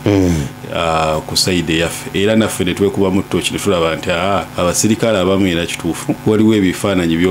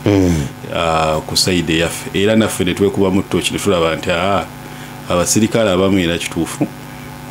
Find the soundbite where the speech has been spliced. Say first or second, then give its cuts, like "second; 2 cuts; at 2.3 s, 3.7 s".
first; 2 cuts; at 4.5 s, 6.2 s